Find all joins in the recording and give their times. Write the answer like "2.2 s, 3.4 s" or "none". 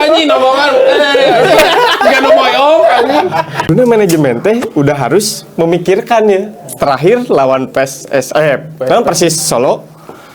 3.7 s